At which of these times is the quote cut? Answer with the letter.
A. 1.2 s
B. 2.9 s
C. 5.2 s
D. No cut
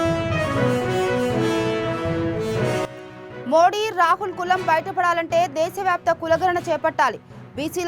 B